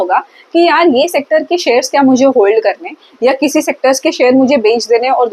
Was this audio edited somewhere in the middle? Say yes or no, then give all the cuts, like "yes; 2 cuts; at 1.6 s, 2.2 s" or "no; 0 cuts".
no; 0 cuts